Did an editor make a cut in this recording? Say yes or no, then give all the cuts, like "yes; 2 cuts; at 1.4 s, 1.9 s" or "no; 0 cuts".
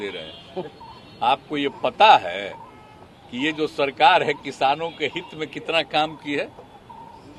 no; 0 cuts